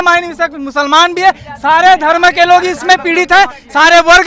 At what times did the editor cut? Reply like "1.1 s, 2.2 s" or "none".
none